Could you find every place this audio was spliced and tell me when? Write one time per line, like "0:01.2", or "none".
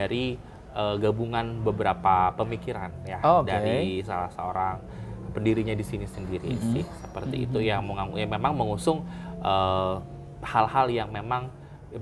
none

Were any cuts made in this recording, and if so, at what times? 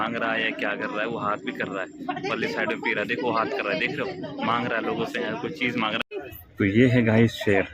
0:06.0

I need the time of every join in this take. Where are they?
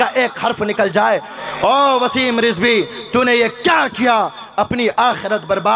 0:01.4

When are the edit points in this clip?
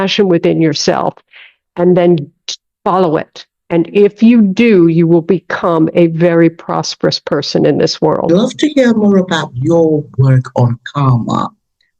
0:08.3

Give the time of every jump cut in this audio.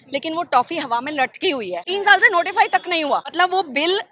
0:01.8
0:03.3

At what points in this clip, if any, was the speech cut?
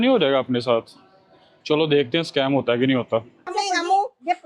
0:03.5

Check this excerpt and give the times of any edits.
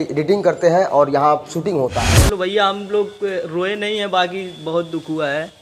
0:02.1

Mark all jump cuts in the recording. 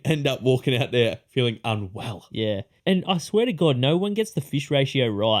0:02.8

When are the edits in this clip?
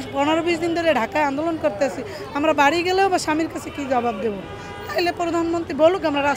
none

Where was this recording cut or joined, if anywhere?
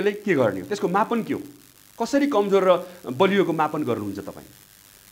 none

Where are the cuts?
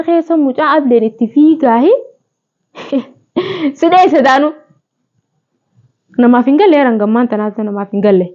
none

